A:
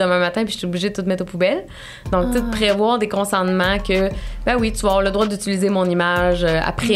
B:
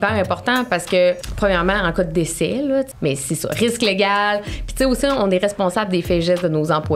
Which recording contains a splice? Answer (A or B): B